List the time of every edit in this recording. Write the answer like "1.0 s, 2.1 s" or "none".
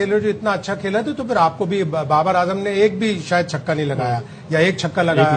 none